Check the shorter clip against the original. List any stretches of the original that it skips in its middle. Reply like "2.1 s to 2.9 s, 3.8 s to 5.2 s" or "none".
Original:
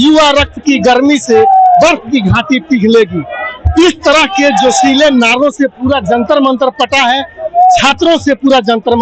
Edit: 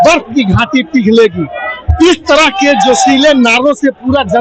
none

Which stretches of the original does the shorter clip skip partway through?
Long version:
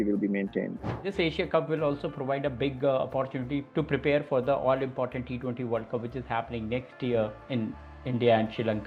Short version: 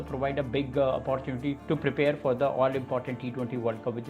none

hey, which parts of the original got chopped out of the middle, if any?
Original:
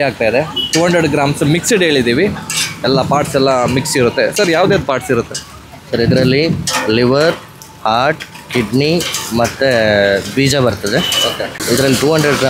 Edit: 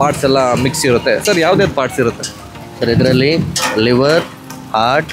none

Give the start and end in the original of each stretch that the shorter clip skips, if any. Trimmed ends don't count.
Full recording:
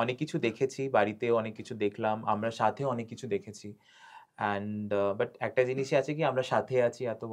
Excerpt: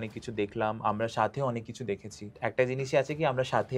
3.8 s to 5.3 s

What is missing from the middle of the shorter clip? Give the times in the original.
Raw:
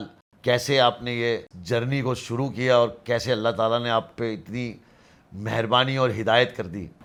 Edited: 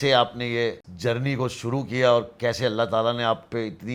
none

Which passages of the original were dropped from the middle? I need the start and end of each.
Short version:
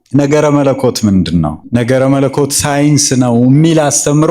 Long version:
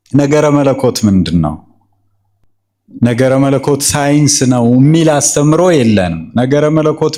1.6 s to 2.9 s

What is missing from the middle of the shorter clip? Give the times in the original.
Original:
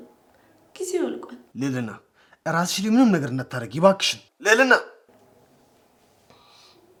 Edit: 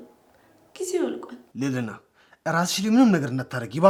none

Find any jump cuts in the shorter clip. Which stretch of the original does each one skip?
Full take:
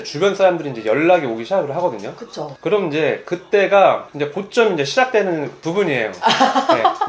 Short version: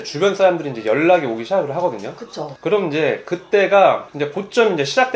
none

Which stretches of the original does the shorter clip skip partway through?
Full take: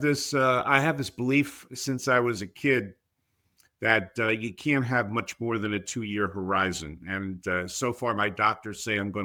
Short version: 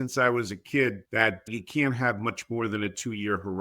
3.5 s to 4.5 s

